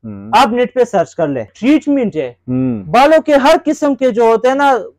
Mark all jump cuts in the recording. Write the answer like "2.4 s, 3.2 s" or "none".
1.5 s

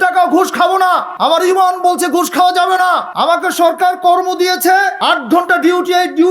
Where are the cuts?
1.1 s, 3.1 s, 4.9 s

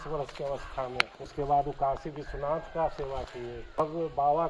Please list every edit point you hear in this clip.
1.3 s, 3.8 s

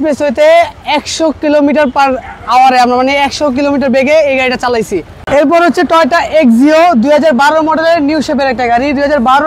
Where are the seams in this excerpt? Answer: 5.2 s

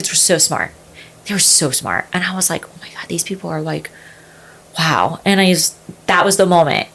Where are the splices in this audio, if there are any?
none

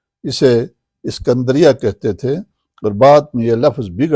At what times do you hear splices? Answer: none

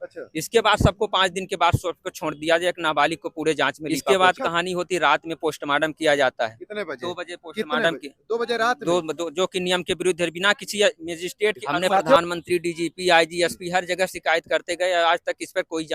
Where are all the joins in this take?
3.9 s, 12.2 s

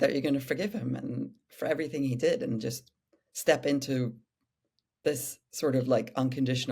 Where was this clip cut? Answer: none

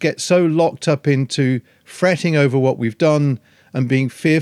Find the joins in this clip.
none

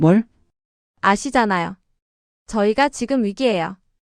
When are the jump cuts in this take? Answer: none

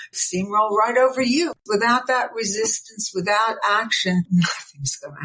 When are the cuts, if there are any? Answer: 1.6 s, 4.3 s

